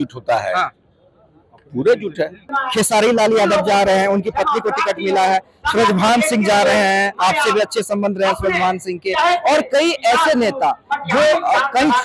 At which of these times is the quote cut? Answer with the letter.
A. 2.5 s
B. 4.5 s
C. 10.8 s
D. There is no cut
A